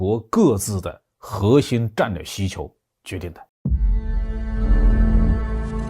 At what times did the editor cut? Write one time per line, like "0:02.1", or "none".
0:03.5